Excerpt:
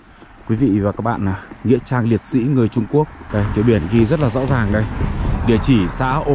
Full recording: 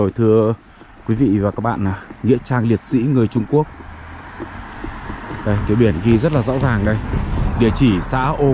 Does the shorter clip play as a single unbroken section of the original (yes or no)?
no